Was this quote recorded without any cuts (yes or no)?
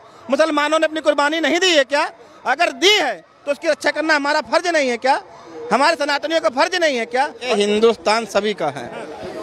no